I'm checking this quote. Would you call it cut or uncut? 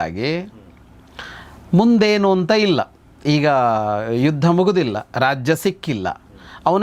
uncut